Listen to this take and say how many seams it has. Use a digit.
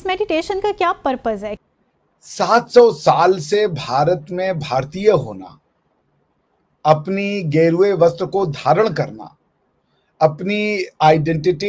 1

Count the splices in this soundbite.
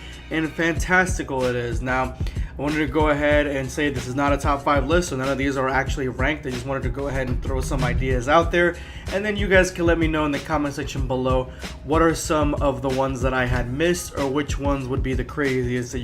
1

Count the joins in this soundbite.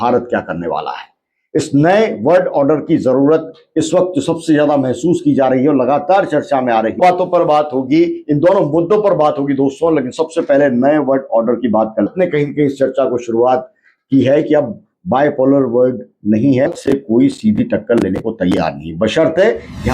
3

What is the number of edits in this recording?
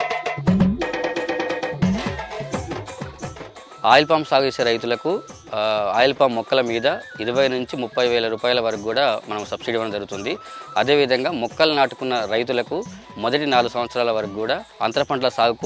1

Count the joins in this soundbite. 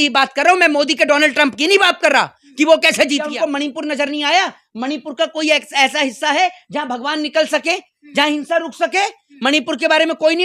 1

